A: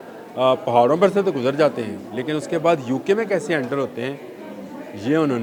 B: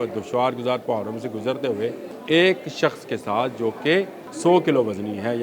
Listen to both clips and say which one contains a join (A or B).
B